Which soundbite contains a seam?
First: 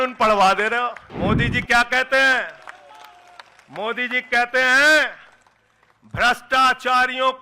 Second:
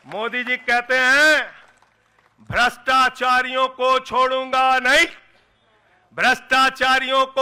first; 1 cut; at 1.1 s

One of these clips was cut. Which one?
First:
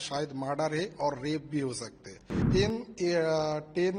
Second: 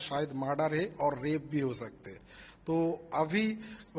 first; 1 cut; at 2.3 s

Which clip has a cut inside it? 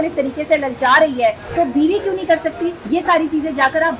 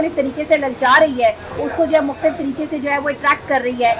first; 2 cuts; at 1.4 s, 2.8 s

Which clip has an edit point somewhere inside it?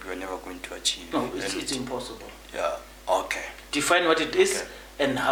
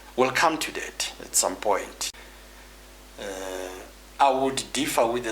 second; 1 cut; at 2.0 s

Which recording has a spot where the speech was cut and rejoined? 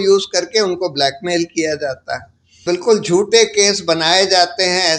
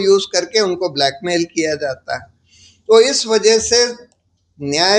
first; 1 cut; at 2.5 s

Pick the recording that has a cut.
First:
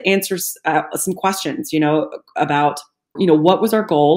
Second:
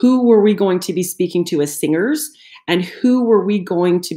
first; 1 cut; at 3.2 s

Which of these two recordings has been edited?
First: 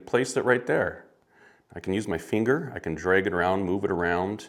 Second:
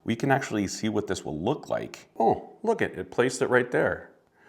second; 1 cut; at 2.1 s

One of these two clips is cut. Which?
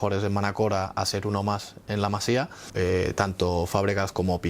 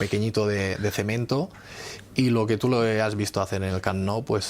first; 1 cut; at 2.7 s

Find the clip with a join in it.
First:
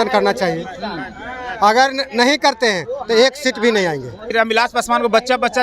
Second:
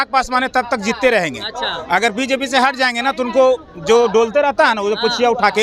first; 1 cut; at 4.3 s

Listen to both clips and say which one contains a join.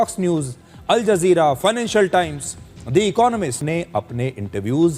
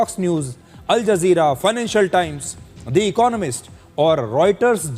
first; 1 cut; at 3.6 s

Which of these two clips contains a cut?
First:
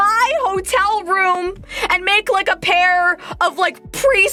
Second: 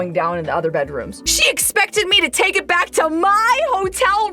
second; 1 cut; at 1.3 s

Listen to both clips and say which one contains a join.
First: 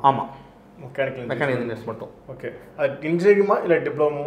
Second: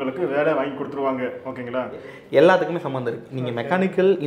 second; 1 cut; at 2.2 s

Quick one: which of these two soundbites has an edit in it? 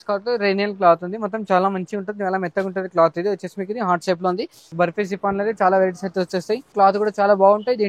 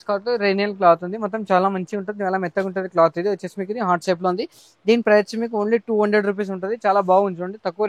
first; 2 cuts; at 4.6 s, 6.7 s

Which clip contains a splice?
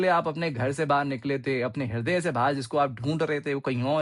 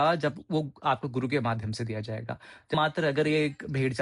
second; 1 cut; at 2.7 s

